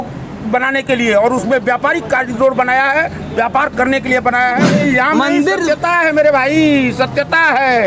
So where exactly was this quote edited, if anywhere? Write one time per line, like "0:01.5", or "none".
0:04.7

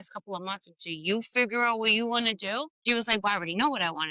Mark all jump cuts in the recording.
0:02.8

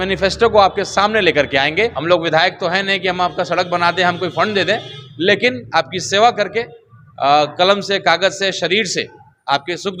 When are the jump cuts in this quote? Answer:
0:02.0

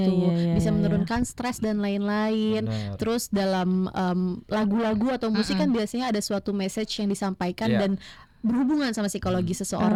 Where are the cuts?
none

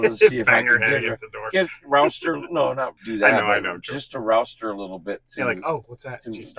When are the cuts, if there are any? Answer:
0:03.0

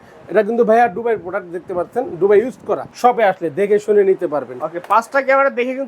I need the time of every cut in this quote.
0:02.9

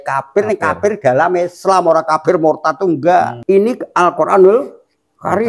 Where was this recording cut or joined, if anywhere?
0:03.4

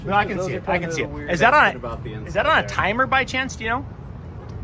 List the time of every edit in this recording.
none

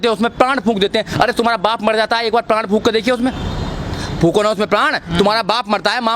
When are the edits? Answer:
none

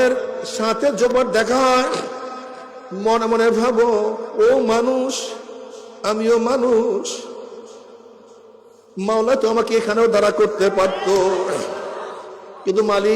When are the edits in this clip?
0:01.1

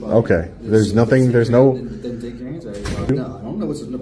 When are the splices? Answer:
0:03.1

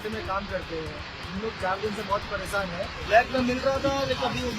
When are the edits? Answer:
0:02.9

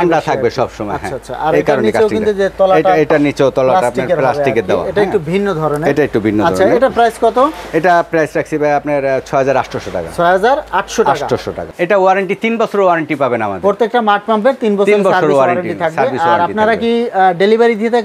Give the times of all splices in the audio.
none

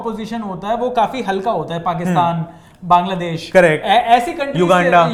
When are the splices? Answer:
none

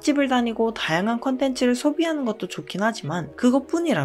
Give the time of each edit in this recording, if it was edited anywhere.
none

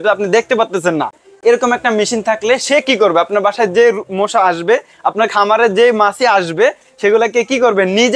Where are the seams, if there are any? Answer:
none

